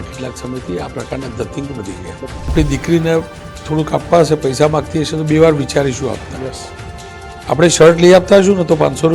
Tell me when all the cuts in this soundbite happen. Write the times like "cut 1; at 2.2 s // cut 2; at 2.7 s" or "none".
cut 1; at 2.5 s

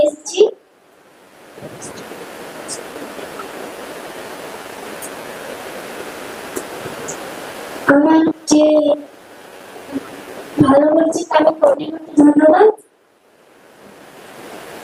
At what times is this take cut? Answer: none

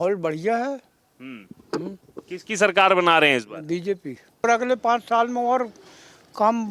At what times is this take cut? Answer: cut 1; at 4.5 s

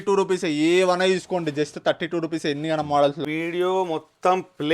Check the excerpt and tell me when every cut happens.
cut 1; at 3.3 s

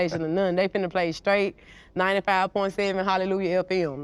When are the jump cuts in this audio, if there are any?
none

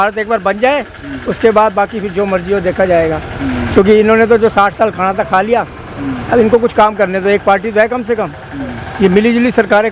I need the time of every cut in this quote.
none

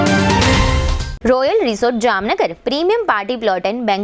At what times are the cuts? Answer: cut 1; at 1.1 s

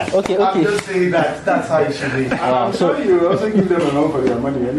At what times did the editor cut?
none

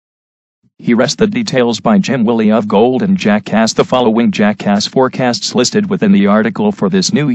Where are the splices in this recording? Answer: none

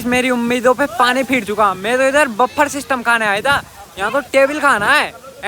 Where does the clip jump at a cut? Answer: none

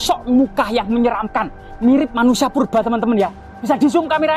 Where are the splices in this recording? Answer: none

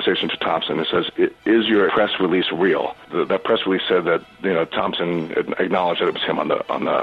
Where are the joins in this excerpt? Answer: cut 1; at 1.9 s // cut 2; at 3.0 s

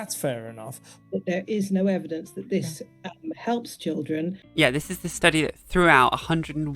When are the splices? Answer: cut 1; at 0.9 s // cut 2; at 4.4 s

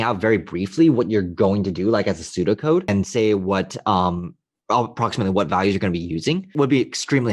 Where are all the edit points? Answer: cut 1; at 2.9 s // cut 2; at 6.5 s

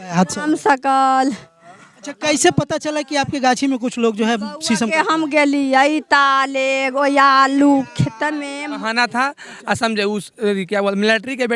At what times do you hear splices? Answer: cut 1; at 8.8 s

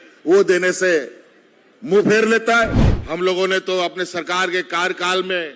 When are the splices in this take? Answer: cut 1; at 2.9 s

